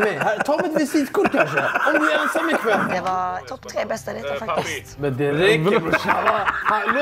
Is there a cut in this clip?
yes; 2 cuts; at 3.0 s, 5.0 s

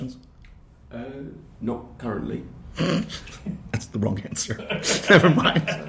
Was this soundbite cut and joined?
no; 0 cuts

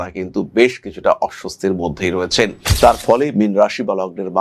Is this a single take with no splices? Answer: no; 1 cut; at 2.6 s

